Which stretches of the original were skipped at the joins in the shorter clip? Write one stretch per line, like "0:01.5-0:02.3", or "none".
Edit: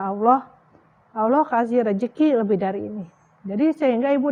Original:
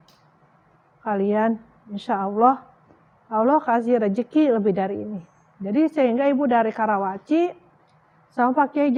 none